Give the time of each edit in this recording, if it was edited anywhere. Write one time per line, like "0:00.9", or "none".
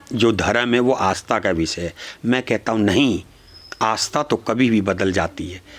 none